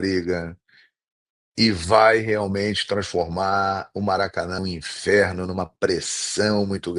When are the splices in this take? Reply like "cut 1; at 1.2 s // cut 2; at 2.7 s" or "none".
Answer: cut 1; at 4.6 s